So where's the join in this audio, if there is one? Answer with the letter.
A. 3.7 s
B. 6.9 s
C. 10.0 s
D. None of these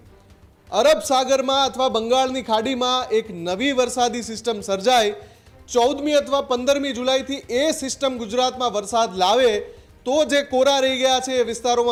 D